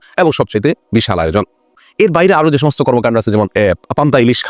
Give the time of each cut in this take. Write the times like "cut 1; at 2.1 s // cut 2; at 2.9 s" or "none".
cut 1; at 1.8 s

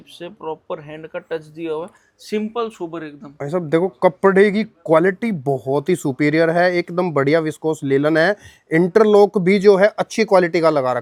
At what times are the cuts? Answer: none

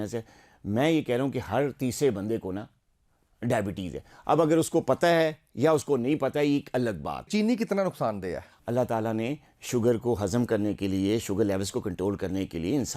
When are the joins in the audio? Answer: cut 1; at 7.3 s // cut 2; at 8.5 s

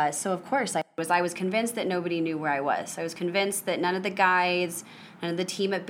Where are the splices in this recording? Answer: cut 1; at 0.9 s

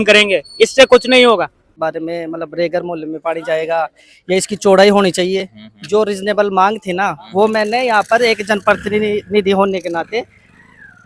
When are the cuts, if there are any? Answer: cut 1; at 1.8 s

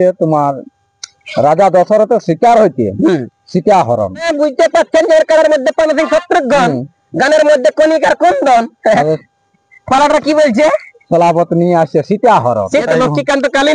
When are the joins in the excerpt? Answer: cut 1; at 4.3 s // cut 2; at 12.9 s

